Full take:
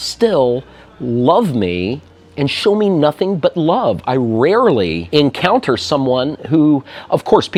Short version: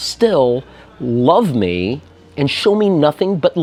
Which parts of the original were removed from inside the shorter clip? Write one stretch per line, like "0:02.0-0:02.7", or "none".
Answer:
none